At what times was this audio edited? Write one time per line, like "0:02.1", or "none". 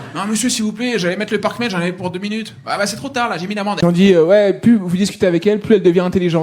0:03.8